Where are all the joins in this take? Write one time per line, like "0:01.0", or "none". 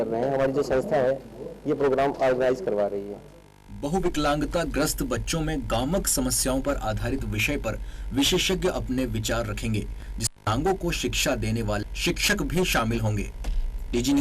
0:10.3

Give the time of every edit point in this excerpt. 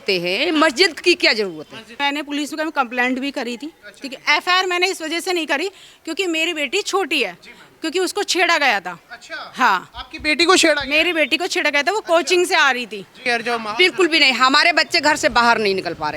0:02.0
0:13.2

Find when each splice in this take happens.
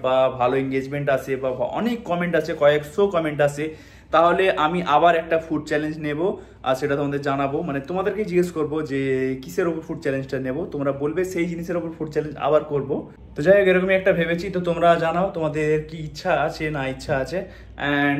none

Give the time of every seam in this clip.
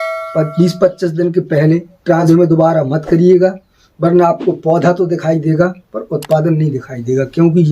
0:02.2

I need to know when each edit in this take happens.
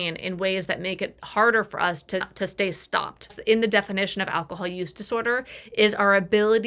0:02.3
0:03.3

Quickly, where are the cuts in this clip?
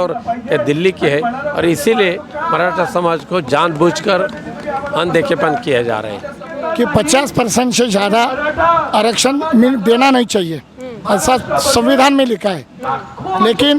0:06.4

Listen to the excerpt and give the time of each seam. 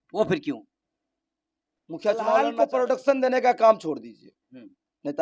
0:02.6

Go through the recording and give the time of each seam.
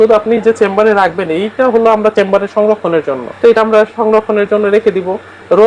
0:03.2

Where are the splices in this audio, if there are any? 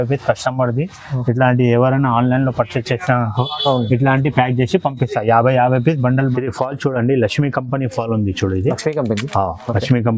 0:06.4

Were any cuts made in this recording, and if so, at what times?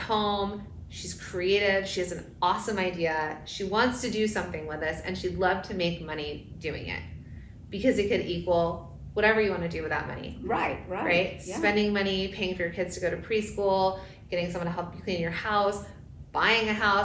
none

